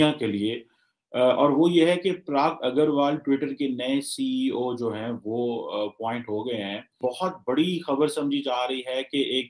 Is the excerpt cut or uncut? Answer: cut